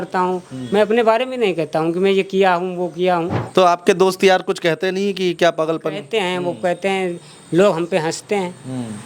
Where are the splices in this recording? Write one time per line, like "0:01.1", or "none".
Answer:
0:03.4